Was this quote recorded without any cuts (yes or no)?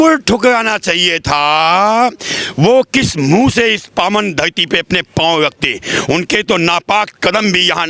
yes